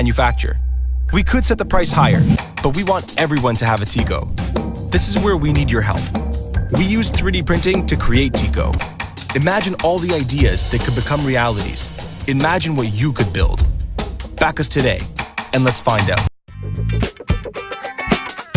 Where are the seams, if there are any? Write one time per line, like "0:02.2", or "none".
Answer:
0:02.9